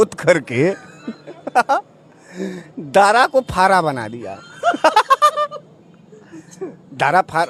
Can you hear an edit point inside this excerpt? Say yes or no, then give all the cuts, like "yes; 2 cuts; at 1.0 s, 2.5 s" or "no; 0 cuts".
no; 0 cuts